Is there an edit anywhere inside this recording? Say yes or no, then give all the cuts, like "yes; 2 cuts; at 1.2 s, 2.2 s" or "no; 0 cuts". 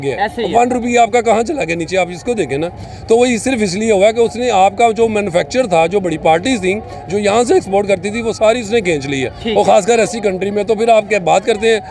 yes; 1 cut; at 9.4 s